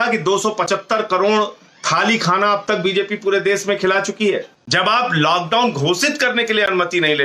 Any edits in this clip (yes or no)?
yes